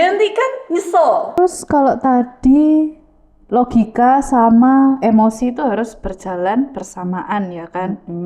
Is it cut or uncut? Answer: cut